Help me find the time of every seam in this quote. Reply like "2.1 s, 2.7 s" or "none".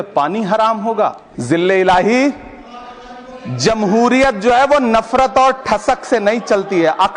1.3 s